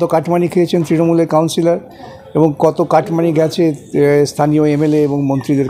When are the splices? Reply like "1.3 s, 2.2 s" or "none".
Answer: none

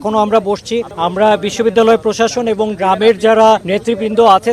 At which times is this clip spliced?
0.9 s, 3.7 s

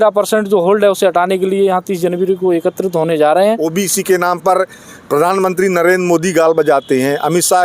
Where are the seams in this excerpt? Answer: 3.6 s

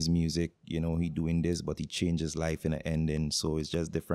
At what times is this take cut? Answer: none

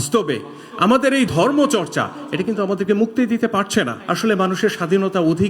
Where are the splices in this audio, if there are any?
1.3 s, 4.0 s

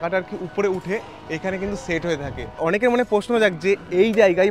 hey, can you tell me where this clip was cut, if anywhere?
2.6 s

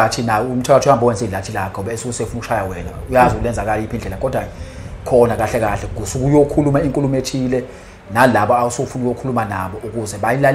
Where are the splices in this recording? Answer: none

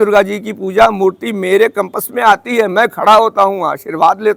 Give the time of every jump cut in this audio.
none

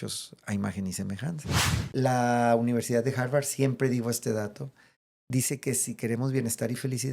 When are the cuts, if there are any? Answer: 1.5 s

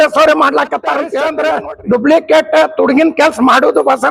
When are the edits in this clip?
1.2 s

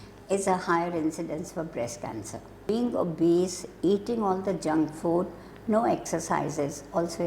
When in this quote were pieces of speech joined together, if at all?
2.6 s

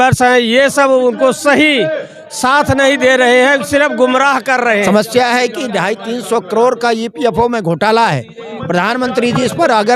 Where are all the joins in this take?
4.8 s

